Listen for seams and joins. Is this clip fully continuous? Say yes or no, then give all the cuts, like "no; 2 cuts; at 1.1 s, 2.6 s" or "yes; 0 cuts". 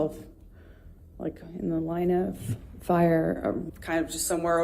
no; 1 cut; at 3.6 s